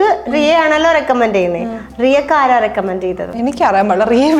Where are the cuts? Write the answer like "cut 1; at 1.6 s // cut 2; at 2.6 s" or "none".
cut 1; at 3.3 s